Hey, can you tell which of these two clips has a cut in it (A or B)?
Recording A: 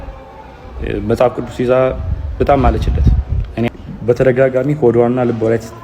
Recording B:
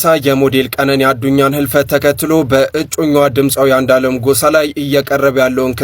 A